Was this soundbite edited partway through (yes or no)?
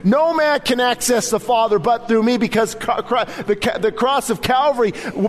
no